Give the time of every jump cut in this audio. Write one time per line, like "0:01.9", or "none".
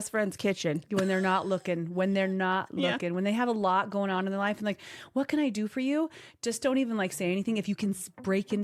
none